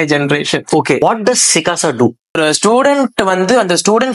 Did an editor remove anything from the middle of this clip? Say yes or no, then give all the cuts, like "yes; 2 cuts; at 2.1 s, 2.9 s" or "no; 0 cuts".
yes; 2 cuts; at 1.0 s, 2.4 s